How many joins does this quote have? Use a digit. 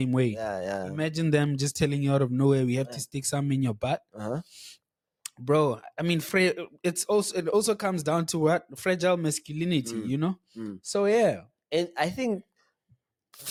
0